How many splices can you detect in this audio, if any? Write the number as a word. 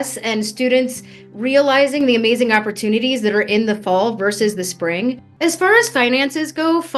one